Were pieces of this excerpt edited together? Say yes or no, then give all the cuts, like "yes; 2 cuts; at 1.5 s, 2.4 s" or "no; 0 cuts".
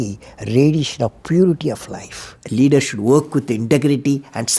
yes; 1 cut; at 2.3 s